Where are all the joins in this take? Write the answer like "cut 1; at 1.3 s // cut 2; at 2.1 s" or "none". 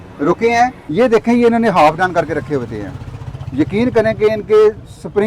cut 1; at 0.9 s